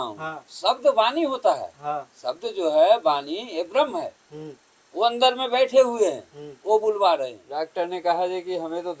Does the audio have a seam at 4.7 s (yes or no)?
no